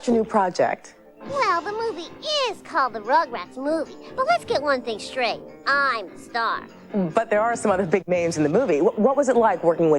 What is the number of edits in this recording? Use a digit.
0